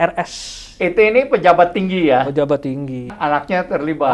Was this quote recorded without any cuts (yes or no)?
no